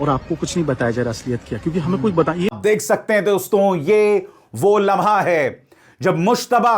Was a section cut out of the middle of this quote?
yes; 1 cut; at 2.5 s

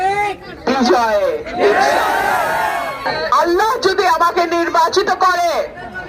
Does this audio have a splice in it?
yes; 1 cut; at 3.0 s

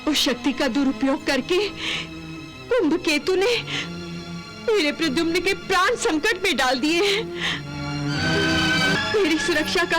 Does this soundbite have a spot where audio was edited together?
yes; 1 cut; at 8.9 s

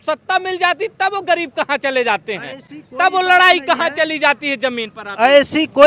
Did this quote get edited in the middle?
no; 0 cuts

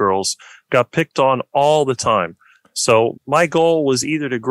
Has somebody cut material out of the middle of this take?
no; 0 cuts

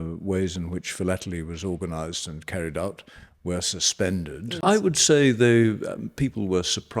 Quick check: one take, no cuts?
no; 1 cut; at 4.6 s

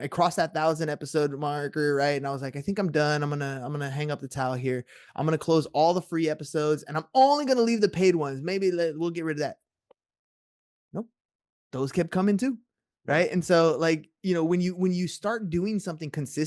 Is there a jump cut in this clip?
no; 0 cuts

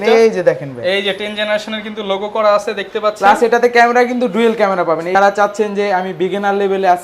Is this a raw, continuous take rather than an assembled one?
no; 1 cut; at 5.2 s

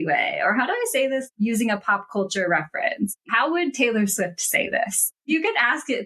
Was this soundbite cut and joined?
yes; 3 cuts; at 1.2 s, 3.1 s, 5.2 s

